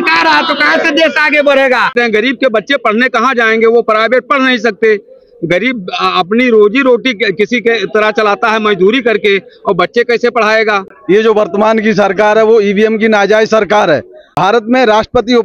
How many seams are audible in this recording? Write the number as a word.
three